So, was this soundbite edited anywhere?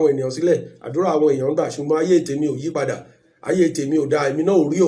no; 0 cuts

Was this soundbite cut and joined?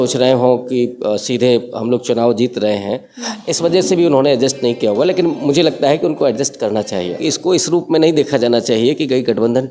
yes; 1 cut; at 7.2 s

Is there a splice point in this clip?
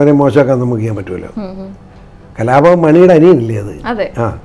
no; 0 cuts

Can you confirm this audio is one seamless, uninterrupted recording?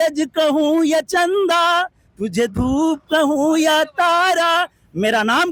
yes; 0 cuts

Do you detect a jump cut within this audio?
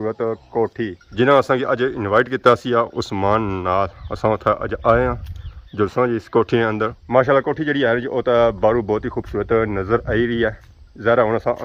no; 0 cuts

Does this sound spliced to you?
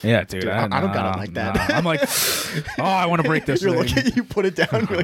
no; 0 cuts

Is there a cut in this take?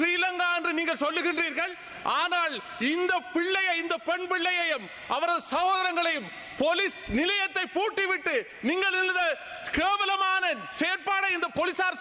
no; 0 cuts

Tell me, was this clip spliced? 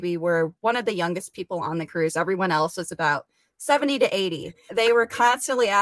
yes; 1 cut; at 4.7 s

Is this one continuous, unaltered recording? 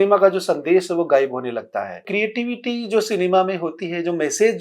no; 1 cut; at 2.1 s

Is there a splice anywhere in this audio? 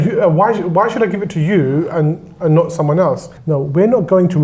yes; 1 cut; at 3.3 s

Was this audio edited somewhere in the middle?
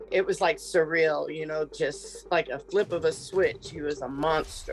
yes; 1 cut; at 1.7 s

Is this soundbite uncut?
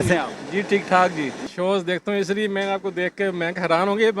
no; 1 cut; at 1.4 s

